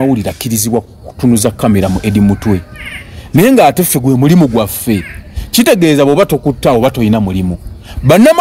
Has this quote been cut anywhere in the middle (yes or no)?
no